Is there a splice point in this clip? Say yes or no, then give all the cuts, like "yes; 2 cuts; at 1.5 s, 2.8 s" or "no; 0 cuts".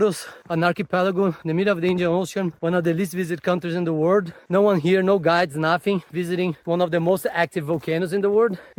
no; 0 cuts